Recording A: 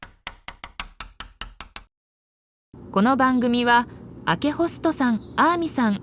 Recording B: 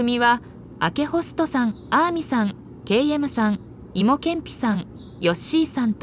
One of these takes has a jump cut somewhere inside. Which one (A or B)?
A